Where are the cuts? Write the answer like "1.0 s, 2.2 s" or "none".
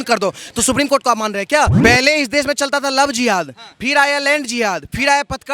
1.8 s